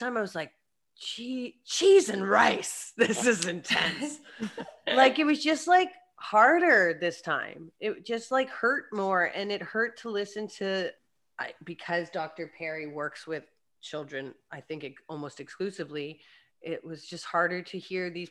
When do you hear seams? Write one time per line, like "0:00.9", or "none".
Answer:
none